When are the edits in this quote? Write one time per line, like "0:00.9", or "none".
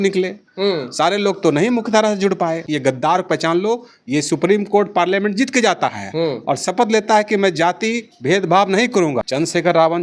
0:02.6
0:09.3

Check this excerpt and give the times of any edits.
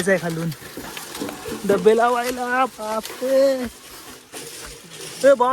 none

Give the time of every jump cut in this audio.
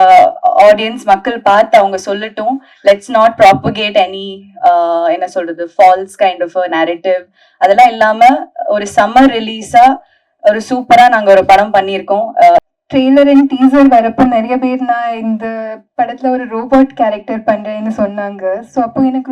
0:12.7

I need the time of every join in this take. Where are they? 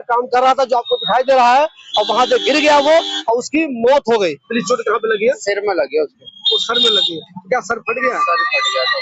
0:04.6

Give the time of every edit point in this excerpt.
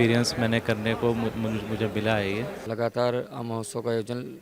0:02.6

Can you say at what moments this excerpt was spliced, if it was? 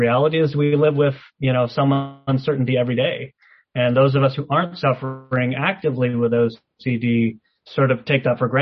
none

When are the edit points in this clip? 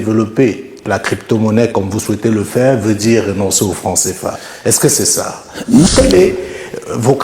0:05.9

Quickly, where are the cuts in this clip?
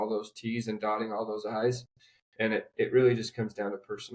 none

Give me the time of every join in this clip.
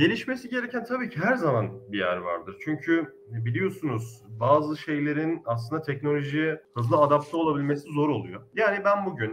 0:08.4

